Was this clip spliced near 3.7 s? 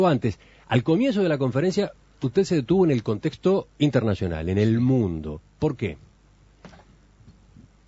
no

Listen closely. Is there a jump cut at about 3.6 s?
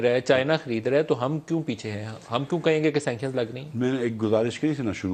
no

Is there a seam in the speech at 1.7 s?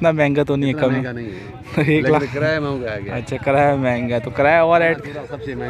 no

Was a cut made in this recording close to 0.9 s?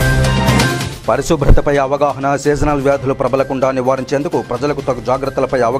yes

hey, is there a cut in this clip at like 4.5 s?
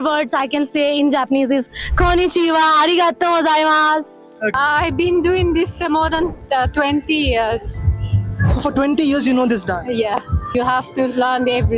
yes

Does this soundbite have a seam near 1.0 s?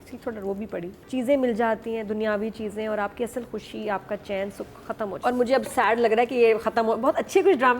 yes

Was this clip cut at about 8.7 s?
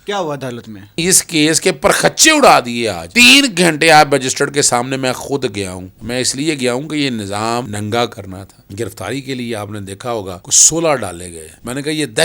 yes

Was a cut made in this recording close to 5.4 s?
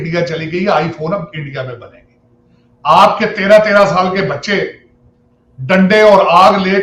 no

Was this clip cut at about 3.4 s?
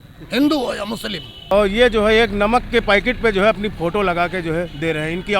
no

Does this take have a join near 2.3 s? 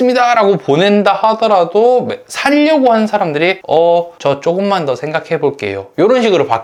no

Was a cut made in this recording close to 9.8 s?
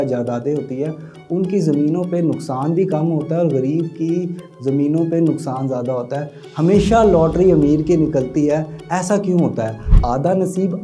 yes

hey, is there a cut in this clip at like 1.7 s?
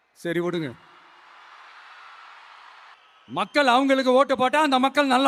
no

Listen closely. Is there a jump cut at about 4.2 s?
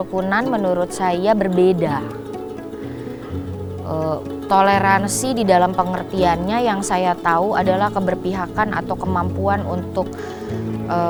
no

